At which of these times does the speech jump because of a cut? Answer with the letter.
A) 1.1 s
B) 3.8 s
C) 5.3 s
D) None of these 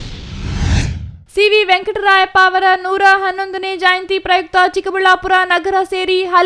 A